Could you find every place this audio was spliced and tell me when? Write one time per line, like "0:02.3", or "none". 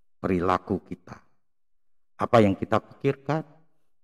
none